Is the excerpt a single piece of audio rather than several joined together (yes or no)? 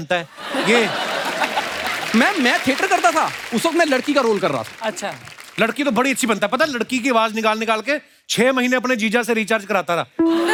yes